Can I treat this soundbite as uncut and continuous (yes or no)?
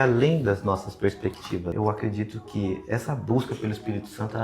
no